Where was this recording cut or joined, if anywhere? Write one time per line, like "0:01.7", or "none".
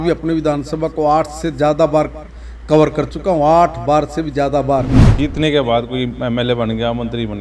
0:05.0